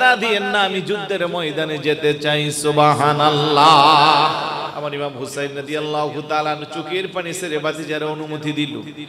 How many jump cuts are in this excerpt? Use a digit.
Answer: 1